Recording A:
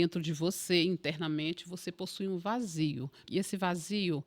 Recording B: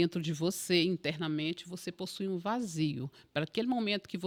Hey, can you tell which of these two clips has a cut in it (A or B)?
A